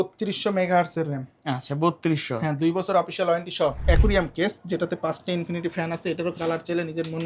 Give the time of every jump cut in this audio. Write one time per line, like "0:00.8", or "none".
0:03.8